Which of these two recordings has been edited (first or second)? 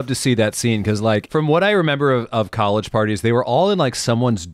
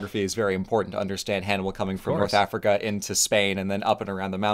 first